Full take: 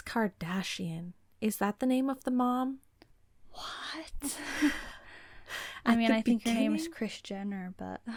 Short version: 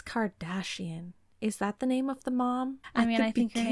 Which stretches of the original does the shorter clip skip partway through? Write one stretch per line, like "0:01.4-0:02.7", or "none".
0:02.8-0:05.7